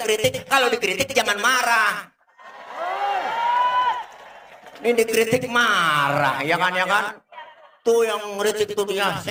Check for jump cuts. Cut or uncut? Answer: uncut